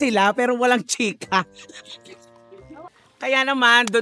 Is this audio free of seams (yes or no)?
yes